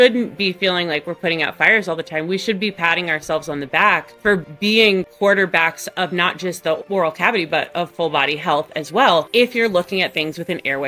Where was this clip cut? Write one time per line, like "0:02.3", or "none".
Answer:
none

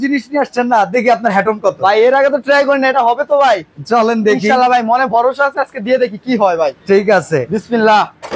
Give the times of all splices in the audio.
none

